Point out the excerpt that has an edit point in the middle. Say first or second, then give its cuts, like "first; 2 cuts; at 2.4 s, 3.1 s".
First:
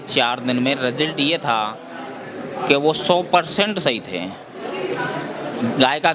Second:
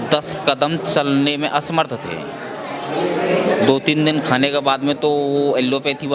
first; 1 cut; at 5.3 s